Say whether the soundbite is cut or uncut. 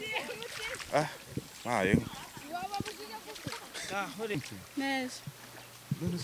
cut